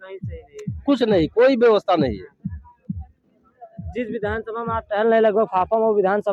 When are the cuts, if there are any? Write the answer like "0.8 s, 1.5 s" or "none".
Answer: none